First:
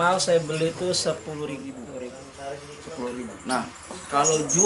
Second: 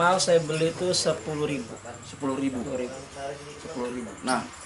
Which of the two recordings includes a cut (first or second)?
first